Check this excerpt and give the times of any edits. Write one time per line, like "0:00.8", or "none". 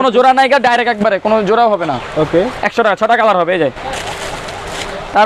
none